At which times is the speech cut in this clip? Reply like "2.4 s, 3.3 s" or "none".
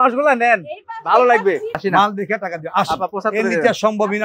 1.8 s

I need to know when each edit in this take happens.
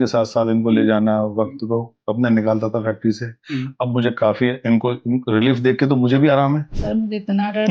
6.7 s

